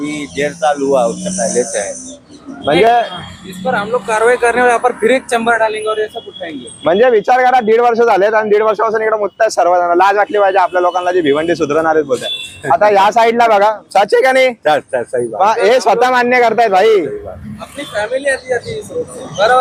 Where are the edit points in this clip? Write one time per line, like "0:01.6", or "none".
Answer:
none

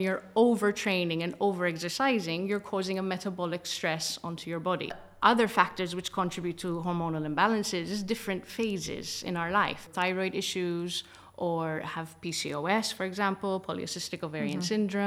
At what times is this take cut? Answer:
0:05.1
0:09.9

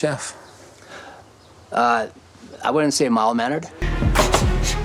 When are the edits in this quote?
0:03.8

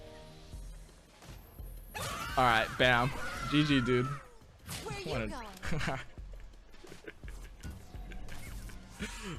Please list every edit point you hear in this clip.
none

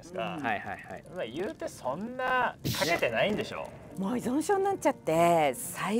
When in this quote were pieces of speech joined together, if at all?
0:02.6
0:03.9

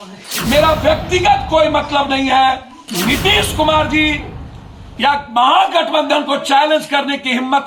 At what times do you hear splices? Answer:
none

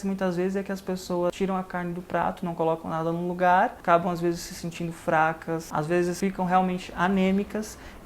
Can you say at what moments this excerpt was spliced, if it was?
0:01.3
0:03.8
0:06.0

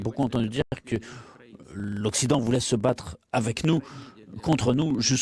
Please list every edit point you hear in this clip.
none

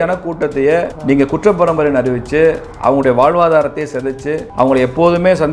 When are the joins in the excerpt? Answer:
0:00.9
0:04.4

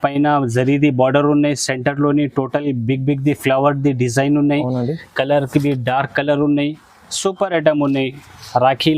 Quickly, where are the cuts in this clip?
none

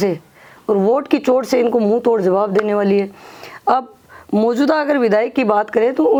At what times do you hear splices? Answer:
none

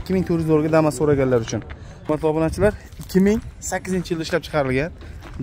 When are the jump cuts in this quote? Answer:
0:02.1

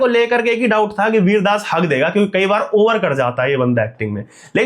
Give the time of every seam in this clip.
none

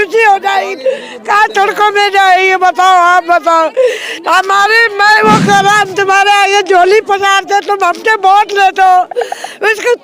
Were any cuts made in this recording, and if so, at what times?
none

